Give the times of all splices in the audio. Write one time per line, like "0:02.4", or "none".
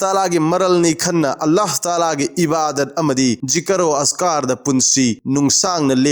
0:03.4
0:05.2